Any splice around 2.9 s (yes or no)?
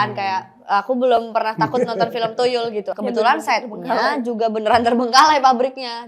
yes